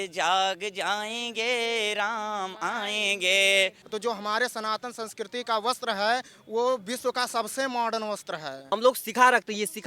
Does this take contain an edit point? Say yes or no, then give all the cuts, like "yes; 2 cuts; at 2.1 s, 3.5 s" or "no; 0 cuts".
yes; 2 cuts; at 3.8 s, 8.7 s